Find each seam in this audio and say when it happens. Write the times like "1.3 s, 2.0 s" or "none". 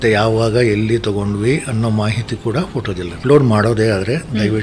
3.2 s